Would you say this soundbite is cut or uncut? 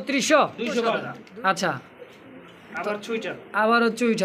cut